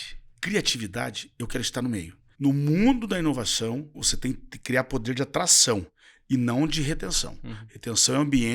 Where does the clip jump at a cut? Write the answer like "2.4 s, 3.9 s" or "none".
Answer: 2.3 s